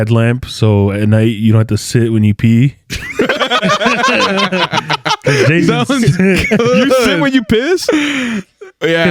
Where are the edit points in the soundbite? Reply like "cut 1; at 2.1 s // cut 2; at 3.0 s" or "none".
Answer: none